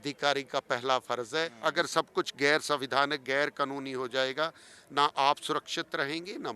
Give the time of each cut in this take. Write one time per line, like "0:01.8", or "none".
0:01.5